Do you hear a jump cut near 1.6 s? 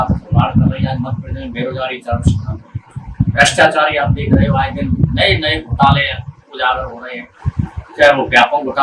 no; 0 cuts

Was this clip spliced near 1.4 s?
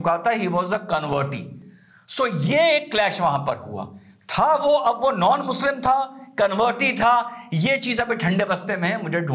no; 0 cuts

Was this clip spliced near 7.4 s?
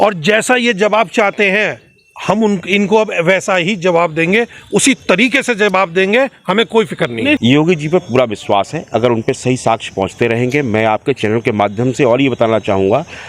yes; 1 cut; at 7.4 s

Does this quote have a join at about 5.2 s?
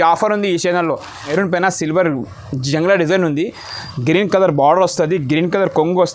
no; 1 cut; at 1.3 s

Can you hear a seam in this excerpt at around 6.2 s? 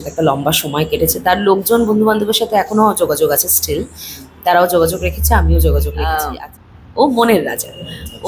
yes; 1 cut; at 6.2 s

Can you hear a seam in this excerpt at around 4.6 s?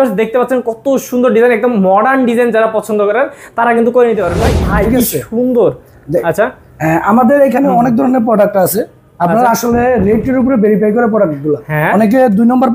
yes; 1 cut; at 4.6 s

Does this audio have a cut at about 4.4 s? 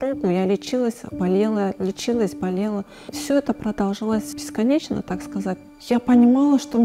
yes; 2 cuts; at 4.4 s, 5.7 s

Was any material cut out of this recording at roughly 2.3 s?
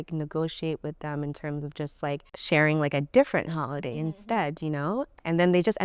yes; 1 cut; at 2.3 s

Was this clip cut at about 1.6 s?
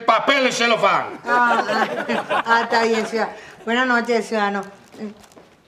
no; 1 cut; at 3.6 s

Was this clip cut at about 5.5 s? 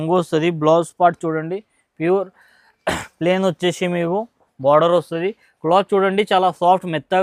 no; 0 cuts

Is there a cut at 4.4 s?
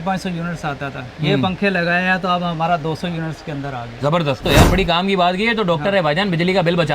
yes; 1 cut; at 4.4 s

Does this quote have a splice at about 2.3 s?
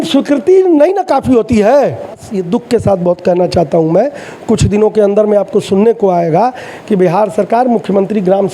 yes; 1 cut; at 2.3 s

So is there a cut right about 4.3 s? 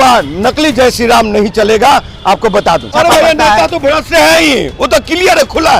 no; 1 cut; at 2.9 s

